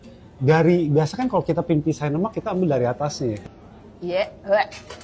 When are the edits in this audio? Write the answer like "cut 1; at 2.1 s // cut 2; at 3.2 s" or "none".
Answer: cut 1; at 3.4 s